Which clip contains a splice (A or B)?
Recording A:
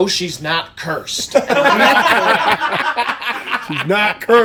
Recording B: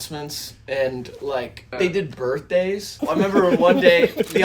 B